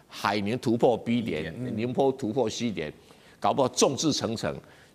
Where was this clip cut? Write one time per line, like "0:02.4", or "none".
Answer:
none